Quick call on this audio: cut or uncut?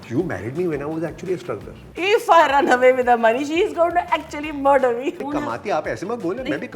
cut